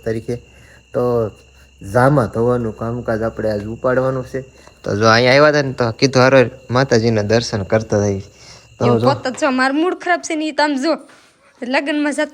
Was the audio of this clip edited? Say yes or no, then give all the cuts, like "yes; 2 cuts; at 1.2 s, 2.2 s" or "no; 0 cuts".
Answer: yes; 1 cut; at 9.1 s